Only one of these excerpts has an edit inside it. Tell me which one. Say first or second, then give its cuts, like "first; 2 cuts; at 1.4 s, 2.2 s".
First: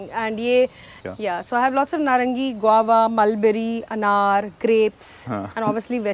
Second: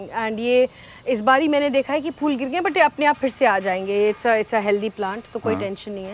first; 1 cut; at 0.9 s